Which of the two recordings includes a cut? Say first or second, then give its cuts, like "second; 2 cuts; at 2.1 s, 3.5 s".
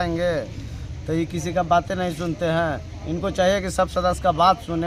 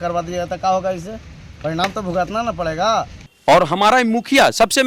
second; 1 cut; at 3.2 s